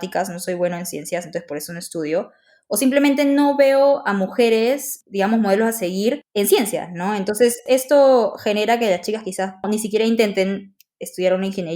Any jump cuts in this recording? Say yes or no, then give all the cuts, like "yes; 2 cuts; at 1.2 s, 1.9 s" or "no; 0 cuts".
yes; 4 cuts; at 4.9 s, 6.2 s, 7.6 s, 9.7 s